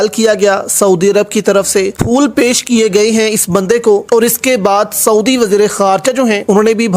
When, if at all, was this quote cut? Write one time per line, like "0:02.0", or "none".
none